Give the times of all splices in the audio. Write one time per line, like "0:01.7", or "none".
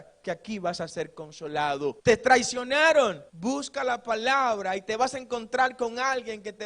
0:02.0
0:03.3